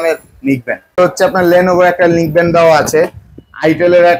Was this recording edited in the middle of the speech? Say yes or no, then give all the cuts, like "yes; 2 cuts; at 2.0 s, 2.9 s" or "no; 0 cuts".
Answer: yes; 1 cut; at 1.0 s